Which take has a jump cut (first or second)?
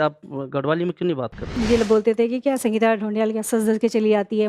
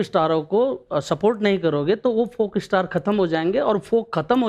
first